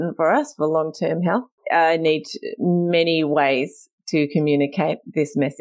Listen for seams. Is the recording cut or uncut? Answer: cut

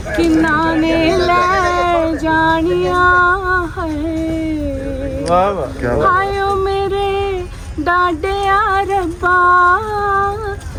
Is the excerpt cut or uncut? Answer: uncut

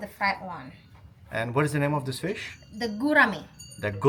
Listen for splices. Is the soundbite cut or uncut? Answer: uncut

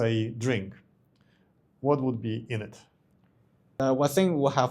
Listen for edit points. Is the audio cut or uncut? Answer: cut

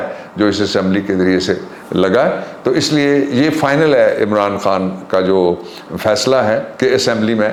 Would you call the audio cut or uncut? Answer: uncut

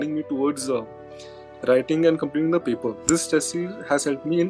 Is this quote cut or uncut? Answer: cut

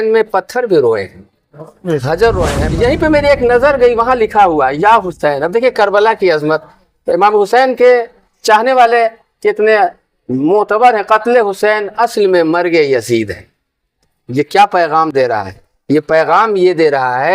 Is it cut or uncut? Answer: cut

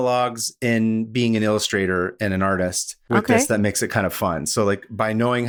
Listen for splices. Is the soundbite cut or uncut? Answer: uncut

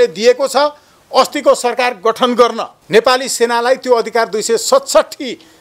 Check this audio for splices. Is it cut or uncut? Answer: cut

